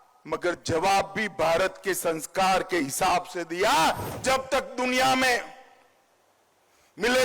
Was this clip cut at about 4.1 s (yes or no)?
yes